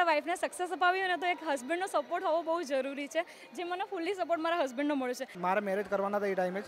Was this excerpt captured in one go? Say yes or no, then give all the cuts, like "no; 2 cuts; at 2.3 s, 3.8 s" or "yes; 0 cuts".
no; 1 cut; at 5.3 s